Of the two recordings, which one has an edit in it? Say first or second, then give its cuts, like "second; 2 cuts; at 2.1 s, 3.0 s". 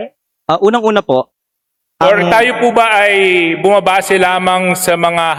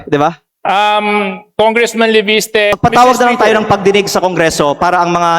second; 1 cut; at 2.7 s